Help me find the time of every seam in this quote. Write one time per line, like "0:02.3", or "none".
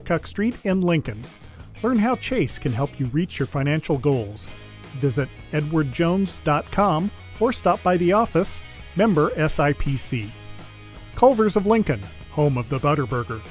none